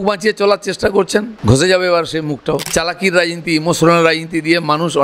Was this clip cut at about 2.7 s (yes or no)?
yes